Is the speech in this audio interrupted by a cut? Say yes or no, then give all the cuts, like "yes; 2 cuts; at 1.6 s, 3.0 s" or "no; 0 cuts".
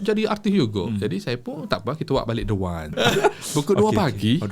yes; 1 cut; at 2.9 s